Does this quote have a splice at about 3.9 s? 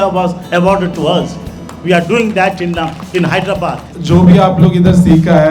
yes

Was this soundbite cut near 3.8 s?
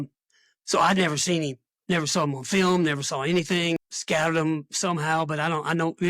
yes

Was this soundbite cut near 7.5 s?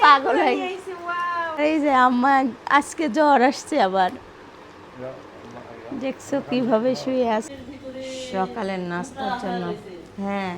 yes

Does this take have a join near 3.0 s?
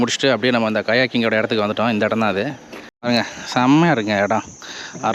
yes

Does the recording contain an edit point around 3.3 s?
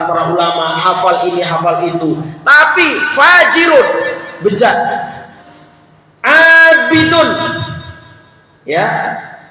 no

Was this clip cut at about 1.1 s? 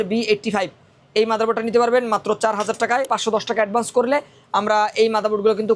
no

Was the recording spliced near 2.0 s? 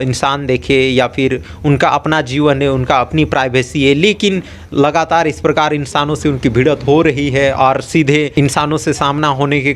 no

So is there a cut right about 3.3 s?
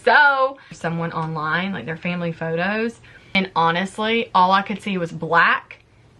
yes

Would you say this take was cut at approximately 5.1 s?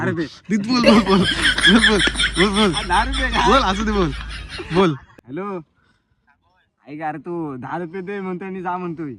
yes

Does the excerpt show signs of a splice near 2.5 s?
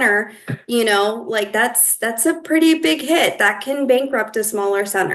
no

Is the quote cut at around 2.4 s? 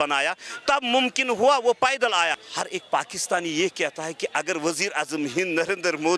yes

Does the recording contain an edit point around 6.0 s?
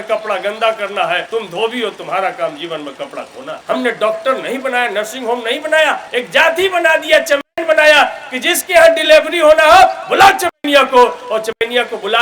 yes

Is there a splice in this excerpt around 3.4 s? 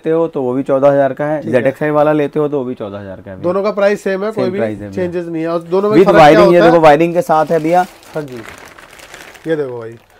no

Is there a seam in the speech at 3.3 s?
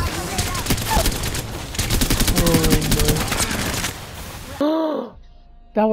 no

